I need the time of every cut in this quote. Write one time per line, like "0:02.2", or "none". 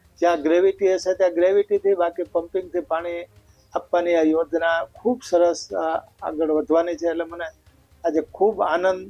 none